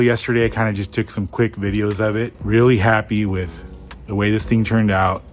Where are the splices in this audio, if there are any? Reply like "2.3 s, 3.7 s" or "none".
2.3 s